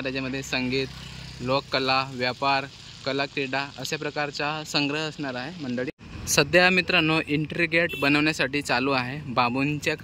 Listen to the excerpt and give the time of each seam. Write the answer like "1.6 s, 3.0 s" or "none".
6.0 s

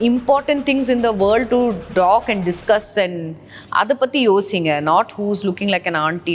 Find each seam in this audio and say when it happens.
none

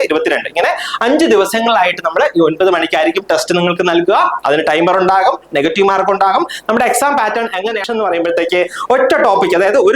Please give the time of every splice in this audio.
7.8 s

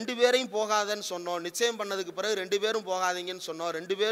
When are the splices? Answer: none

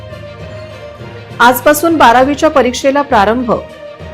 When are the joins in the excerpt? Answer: 0.9 s

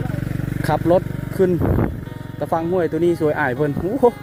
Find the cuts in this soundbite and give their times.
none

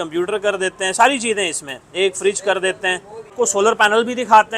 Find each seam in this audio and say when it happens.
3.3 s

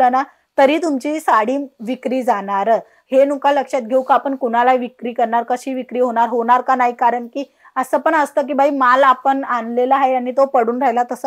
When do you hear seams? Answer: none

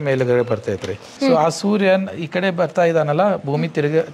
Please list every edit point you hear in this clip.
1.1 s

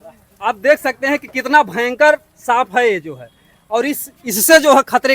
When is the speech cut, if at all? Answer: none

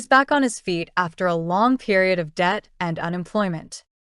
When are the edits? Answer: 1.9 s

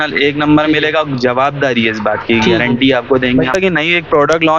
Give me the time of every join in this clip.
3.6 s

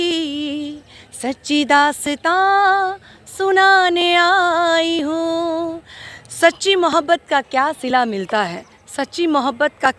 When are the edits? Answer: none

